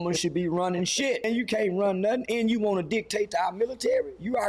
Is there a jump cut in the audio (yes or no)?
yes